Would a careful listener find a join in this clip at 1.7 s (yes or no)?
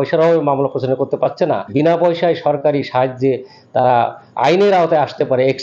yes